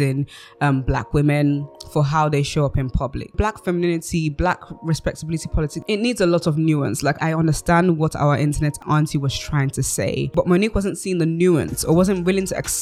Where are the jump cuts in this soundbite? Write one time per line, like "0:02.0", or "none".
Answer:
0:03.3
0:05.8
0:07.2
0:08.8
0:10.3